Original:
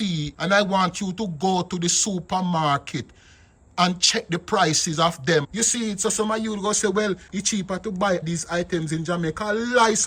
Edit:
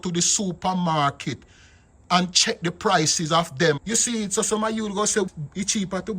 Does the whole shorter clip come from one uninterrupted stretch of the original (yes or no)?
no